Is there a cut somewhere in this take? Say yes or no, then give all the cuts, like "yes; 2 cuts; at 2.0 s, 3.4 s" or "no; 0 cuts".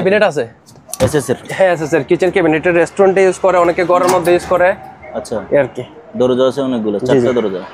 no; 0 cuts